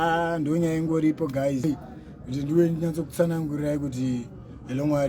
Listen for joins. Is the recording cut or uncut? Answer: cut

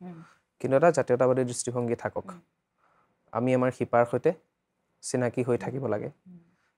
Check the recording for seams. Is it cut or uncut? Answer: uncut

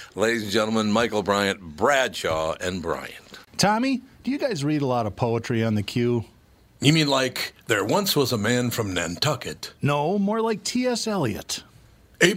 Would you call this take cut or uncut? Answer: cut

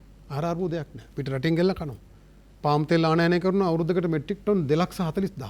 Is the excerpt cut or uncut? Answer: uncut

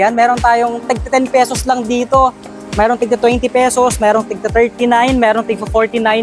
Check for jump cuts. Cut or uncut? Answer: uncut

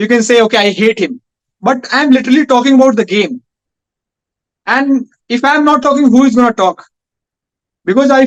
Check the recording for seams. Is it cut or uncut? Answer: uncut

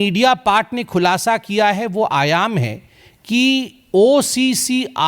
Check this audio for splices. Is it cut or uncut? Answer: uncut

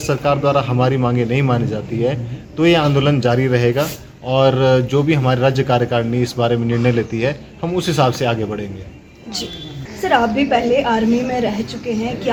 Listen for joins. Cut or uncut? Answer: uncut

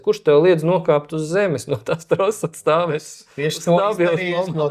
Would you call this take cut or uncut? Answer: uncut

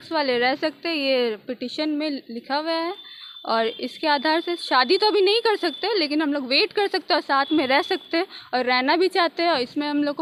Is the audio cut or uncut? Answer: uncut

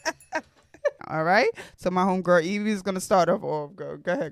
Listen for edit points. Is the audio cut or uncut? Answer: cut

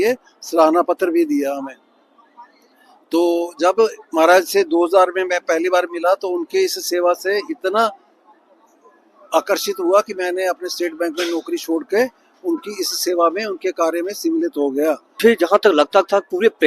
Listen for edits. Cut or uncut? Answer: cut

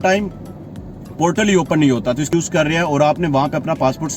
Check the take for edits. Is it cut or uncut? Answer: cut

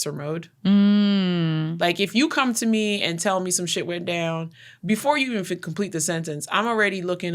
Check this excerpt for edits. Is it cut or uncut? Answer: uncut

